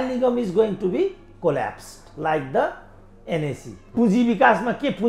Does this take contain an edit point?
yes; 1 cut; at 3.9 s

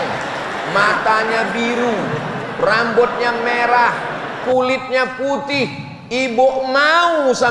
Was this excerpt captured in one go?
yes; 0 cuts

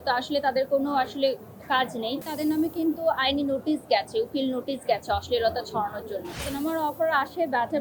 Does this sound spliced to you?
yes; 2 cuts; at 2.2 s, 6.4 s

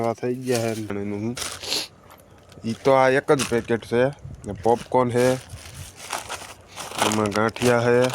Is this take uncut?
no; 1 cut; at 0.9 s

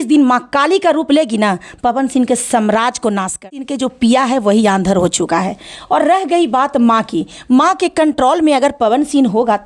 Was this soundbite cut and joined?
yes; 1 cut; at 3.7 s

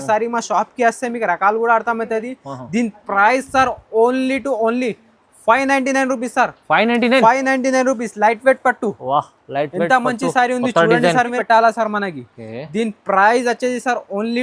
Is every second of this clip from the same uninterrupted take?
no; 1 cut; at 11.4 s

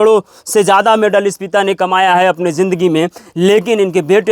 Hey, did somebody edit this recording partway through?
no; 0 cuts

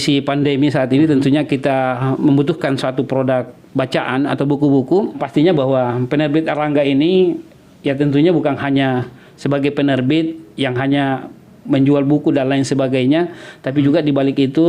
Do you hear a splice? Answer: yes; 1 cut; at 5.2 s

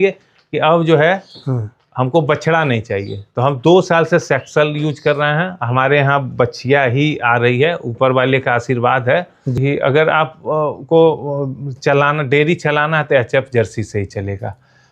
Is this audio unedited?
no; 1 cut; at 9.6 s

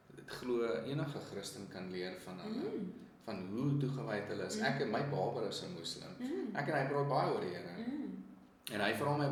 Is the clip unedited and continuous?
yes; 0 cuts

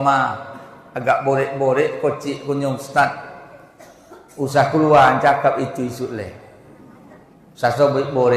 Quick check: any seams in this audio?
no; 0 cuts

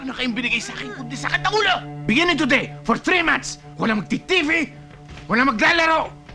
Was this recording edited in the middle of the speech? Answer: no; 0 cuts

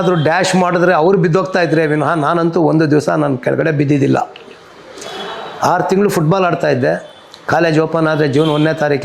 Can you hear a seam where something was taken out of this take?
no; 0 cuts

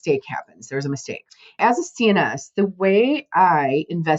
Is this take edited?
yes; 1 cut; at 1.6 s

